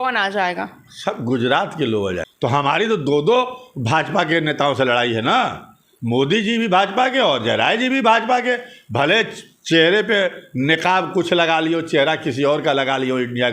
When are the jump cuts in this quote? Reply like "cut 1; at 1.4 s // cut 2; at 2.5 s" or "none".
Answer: cut 1; at 2.2 s